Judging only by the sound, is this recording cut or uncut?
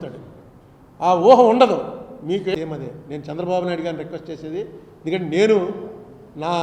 cut